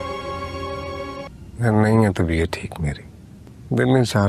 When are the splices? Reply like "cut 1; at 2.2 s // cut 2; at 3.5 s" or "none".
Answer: cut 1; at 1.2 s